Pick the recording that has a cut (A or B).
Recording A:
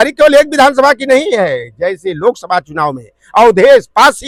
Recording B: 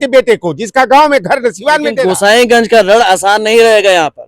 B